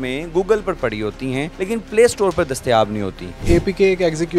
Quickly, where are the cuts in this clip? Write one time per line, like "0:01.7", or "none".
0:01.5
0:03.4

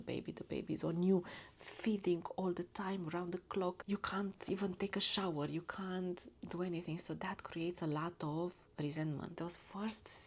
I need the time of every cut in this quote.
0:03.8
0:09.4

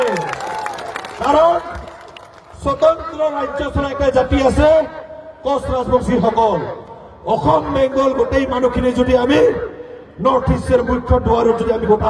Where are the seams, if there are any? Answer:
none

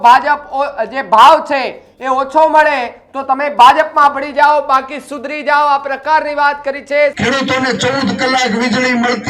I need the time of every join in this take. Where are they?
0:07.1

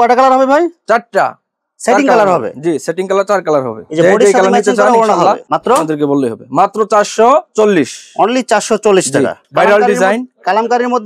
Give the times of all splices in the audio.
none

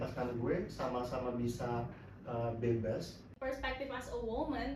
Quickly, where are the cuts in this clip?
0:03.3

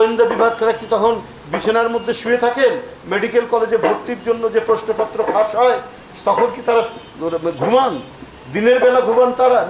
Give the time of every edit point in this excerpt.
none

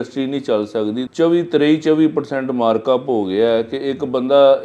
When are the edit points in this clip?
0:01.1

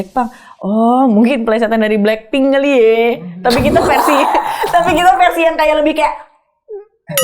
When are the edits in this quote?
none

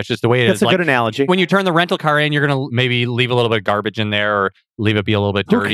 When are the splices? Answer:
0:02.7

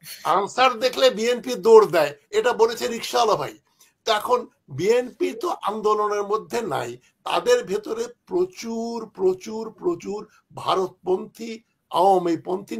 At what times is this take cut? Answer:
none

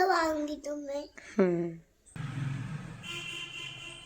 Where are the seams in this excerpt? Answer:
0:02.0

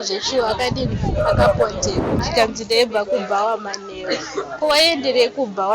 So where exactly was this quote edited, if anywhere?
0:02.2

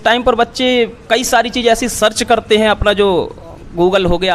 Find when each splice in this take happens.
none

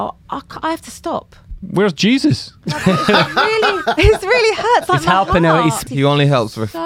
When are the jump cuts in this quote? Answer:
0:05.8

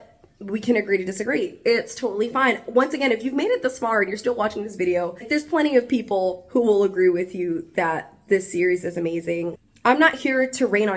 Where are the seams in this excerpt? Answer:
0:05.3
0:09.6

